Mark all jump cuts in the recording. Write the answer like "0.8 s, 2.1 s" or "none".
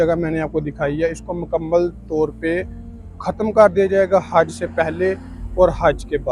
none

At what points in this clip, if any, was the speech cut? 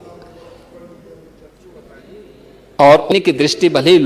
3.1 s

